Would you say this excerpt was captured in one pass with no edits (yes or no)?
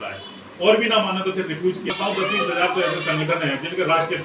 no